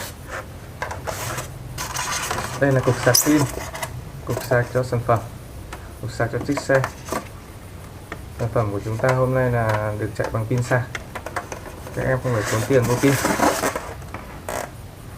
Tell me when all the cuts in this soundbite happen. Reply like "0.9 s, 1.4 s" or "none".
4.9 s